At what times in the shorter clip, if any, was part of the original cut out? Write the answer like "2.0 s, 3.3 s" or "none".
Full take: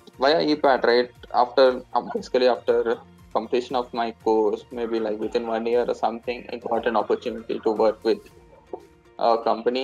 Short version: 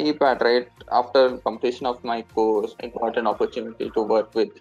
1.4 s, 2.8 s